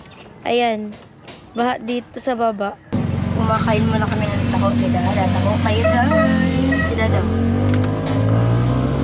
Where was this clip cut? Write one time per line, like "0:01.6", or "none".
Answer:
0:02.9